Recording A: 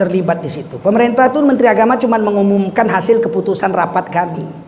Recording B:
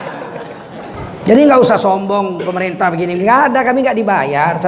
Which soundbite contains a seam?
B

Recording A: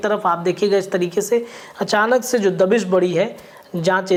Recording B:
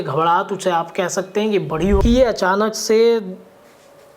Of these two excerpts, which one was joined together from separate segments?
B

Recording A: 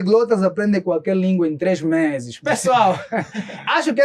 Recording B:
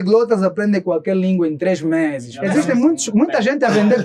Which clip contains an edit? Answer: B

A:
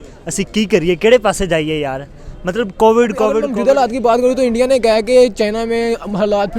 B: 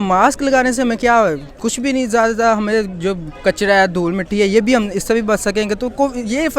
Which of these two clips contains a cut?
A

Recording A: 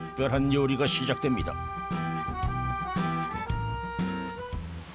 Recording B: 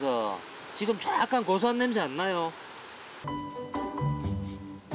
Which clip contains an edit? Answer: B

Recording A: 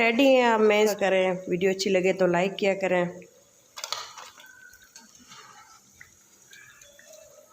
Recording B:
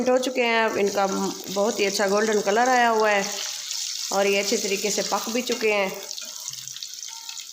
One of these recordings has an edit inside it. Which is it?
A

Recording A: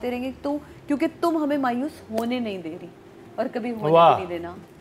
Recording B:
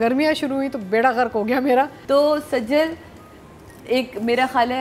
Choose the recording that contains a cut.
B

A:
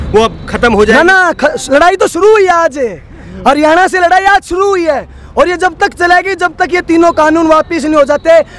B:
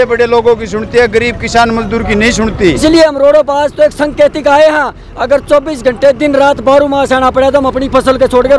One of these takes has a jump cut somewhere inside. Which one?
B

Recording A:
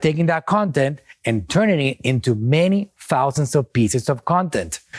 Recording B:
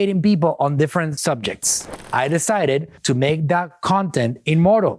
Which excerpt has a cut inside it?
B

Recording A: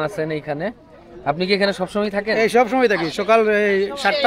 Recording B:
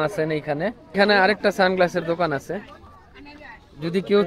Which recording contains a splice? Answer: B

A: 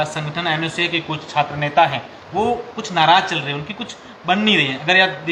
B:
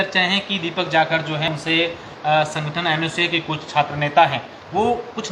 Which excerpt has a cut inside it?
B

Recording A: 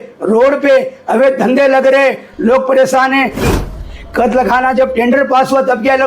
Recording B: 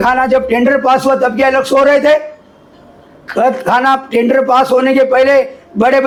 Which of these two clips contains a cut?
A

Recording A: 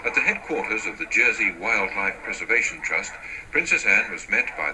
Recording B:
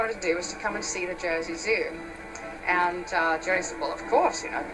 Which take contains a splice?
A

